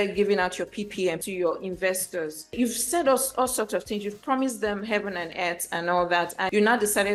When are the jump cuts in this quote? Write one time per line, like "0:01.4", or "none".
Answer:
none